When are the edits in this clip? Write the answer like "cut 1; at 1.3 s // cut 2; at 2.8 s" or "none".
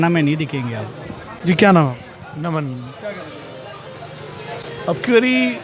none